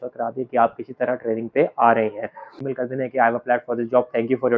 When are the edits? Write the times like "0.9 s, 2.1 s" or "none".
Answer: 2.5 s